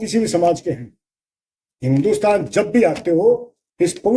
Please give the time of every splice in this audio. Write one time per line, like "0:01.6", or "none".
none